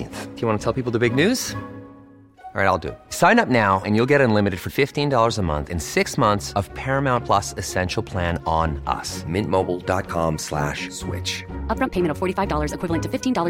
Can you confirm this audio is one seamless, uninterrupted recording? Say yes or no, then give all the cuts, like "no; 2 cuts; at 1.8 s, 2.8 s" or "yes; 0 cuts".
yes; 0 cuts